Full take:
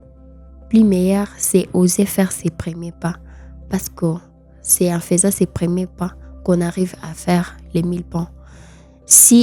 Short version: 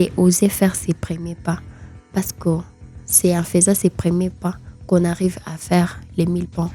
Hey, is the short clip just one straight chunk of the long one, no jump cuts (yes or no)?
yes